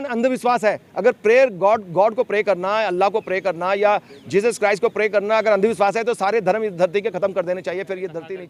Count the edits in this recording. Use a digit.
0